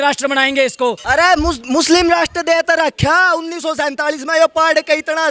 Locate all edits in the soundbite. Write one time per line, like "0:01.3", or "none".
0:01.0